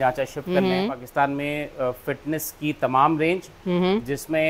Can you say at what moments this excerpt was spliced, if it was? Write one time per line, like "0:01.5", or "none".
0:01.0